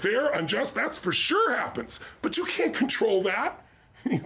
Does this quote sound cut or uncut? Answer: uncut